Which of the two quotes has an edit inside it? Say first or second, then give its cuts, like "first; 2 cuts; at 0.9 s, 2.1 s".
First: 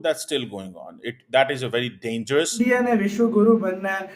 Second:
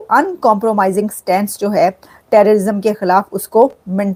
first; 1 cut; at 2.6 s